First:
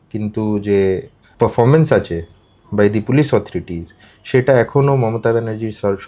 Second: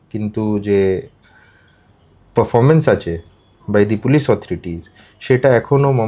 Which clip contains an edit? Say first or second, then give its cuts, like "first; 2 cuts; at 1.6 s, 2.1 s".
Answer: first; 1 cut; at 1.2 s